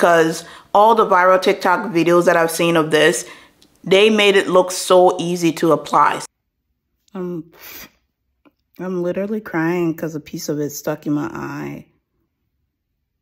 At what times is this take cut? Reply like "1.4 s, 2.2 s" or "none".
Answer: 6.2 s, 12.3 s